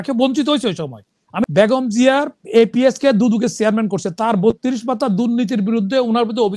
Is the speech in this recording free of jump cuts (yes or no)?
no